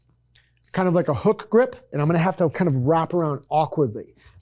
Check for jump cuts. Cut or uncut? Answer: cut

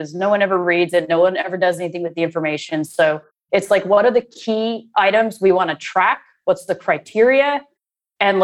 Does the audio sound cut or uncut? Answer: uncut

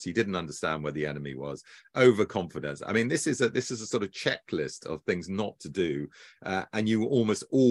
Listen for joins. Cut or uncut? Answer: uncut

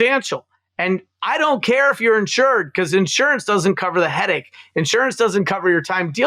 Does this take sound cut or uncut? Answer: uncut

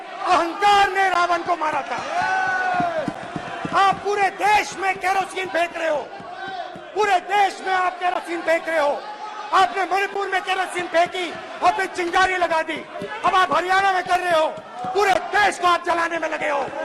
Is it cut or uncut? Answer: uncut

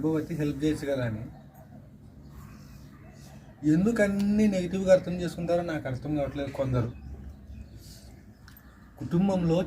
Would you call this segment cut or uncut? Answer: cut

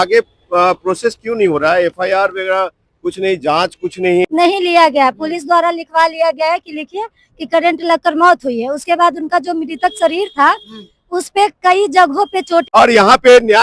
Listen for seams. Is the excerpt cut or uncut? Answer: cut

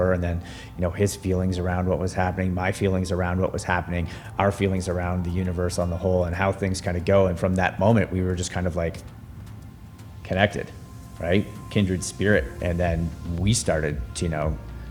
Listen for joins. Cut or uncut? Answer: uncut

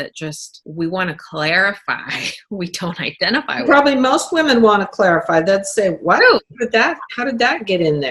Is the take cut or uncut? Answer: uncut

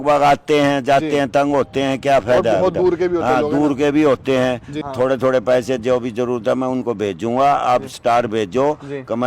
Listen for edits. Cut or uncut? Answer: cut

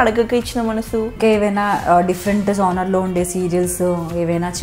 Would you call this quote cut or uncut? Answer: cut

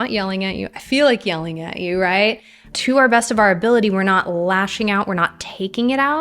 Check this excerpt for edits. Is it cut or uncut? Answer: cut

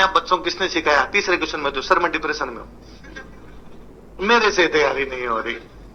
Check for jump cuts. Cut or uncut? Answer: uncut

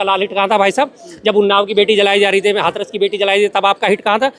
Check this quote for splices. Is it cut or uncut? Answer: uncut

